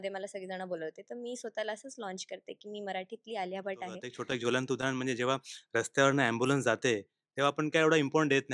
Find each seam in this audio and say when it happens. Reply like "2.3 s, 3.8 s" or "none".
4.1 s